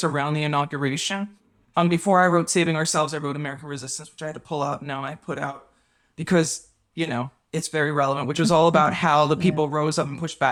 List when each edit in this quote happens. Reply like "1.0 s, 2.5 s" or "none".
none